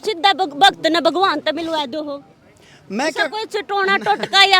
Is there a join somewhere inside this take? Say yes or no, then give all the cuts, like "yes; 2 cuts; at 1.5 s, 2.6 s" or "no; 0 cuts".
no; 0 cuts